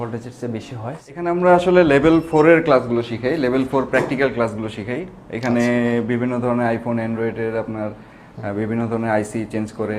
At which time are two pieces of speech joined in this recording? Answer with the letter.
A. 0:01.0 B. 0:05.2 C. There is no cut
A